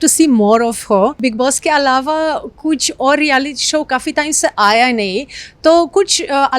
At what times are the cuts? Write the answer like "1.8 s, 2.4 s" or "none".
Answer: 1.2 s